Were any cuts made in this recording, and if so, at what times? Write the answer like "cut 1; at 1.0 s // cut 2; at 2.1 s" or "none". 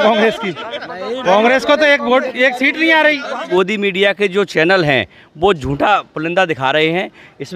cut 1; at 3.4 s